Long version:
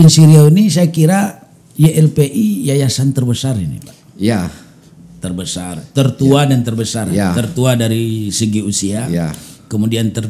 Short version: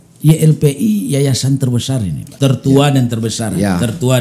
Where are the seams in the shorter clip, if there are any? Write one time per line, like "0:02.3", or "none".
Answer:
0:02.3